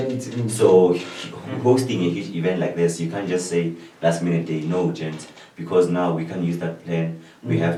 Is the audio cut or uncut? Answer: uncut